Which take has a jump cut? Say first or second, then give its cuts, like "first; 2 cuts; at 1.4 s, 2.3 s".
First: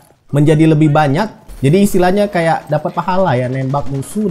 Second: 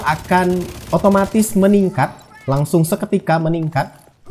first; 1 cut; at 1.4 s